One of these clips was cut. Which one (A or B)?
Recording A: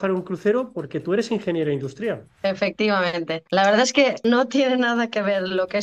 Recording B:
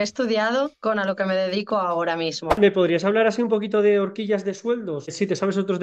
B